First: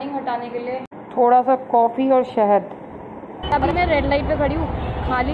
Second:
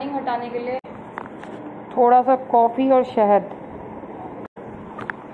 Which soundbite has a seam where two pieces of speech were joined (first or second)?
first